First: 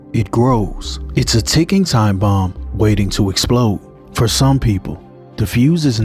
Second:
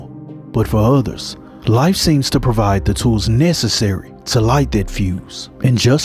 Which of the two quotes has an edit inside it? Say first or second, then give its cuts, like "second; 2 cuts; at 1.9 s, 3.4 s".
first; 1 cut; at 3.9 s